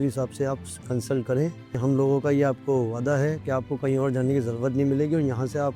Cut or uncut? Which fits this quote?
uncut